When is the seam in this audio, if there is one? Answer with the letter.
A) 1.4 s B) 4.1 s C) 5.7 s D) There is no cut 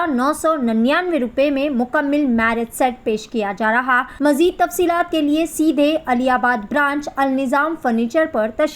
B